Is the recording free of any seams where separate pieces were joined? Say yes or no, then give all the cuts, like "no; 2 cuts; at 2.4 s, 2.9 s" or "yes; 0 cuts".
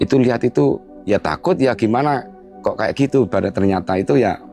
no; 1 cut; at 0.9 s